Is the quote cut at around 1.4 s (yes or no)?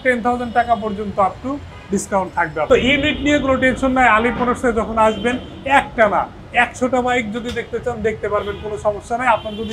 no